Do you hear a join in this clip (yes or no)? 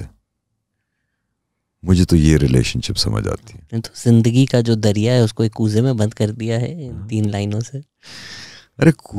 no